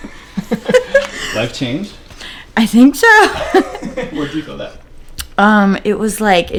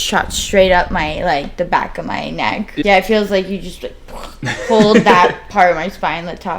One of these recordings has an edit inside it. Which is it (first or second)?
second